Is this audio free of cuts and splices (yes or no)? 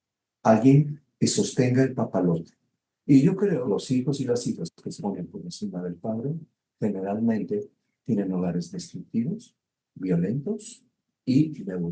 no